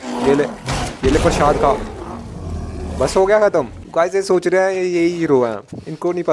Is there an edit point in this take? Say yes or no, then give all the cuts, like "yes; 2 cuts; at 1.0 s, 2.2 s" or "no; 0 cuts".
yes; 1 cut; at 3.8 s